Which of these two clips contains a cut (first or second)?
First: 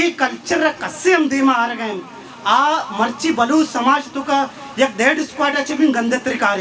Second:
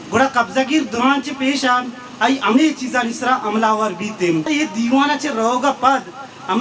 second